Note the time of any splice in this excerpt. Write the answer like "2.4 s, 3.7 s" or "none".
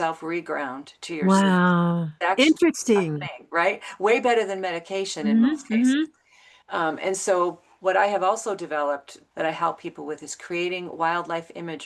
9.2 s